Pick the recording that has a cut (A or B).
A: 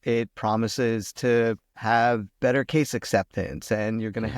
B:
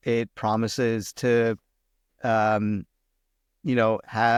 A